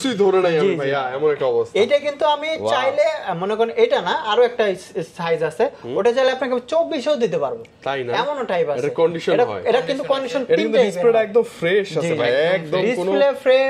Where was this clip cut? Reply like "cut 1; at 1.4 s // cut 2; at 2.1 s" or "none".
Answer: none